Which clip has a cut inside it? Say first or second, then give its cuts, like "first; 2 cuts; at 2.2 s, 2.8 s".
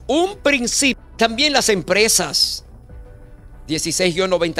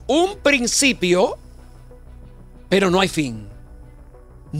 first; 1 cut; at 1.0 s